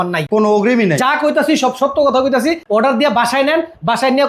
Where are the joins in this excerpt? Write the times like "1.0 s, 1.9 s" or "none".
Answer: 2.6 s